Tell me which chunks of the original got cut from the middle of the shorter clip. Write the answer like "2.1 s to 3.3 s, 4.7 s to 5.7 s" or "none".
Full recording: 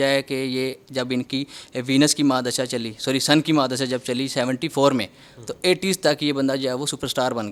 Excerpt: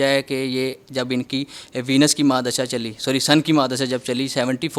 none